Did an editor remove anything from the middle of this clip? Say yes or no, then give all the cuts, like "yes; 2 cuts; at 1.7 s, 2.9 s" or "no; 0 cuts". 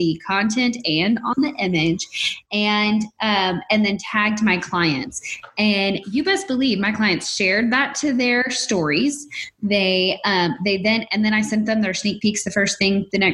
no; 0 cuts